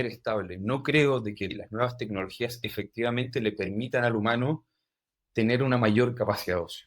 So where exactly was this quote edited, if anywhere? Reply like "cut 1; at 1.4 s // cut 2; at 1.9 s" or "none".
cut 1; at 1.5 s